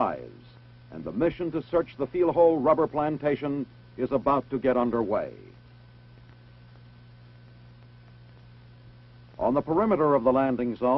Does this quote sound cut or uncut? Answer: uncut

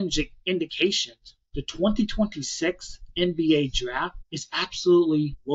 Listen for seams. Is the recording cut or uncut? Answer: uncut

